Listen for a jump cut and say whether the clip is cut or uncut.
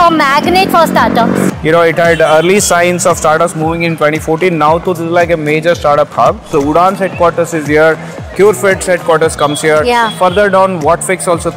cut